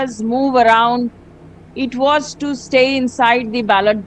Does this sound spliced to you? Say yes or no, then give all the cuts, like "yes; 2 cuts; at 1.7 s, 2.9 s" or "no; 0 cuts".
no; 0 cuts